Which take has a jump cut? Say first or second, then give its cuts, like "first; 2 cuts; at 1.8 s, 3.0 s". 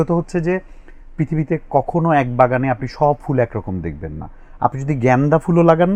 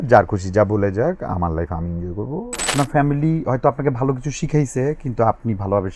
second; 1 cut; at 2.7 s